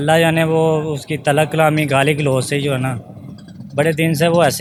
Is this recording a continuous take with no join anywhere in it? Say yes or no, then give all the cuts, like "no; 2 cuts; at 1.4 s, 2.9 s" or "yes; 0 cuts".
yes; 0 cuts